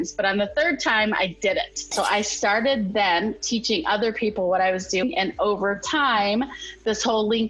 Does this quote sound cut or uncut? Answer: cut